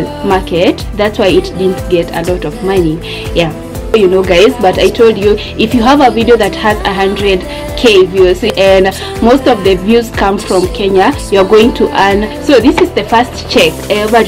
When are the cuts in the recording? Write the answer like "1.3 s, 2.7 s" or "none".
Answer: 12.3 s